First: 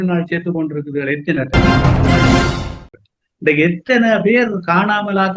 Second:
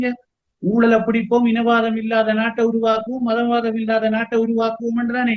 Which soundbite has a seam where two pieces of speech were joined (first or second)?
first